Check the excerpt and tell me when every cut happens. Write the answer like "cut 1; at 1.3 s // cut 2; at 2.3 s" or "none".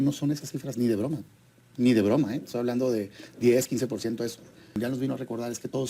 cut 1; at 4.8 s